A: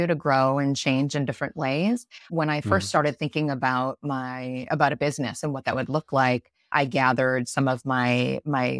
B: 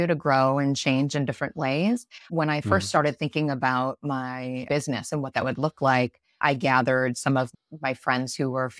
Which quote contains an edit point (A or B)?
B